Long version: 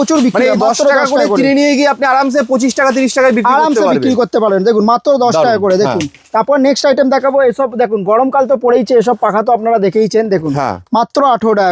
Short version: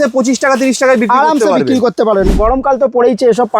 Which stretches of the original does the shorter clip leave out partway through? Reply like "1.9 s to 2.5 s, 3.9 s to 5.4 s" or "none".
4.6 s to 8.0 s